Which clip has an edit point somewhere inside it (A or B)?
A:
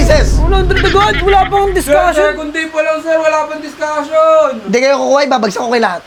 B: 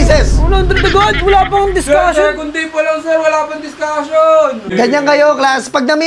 B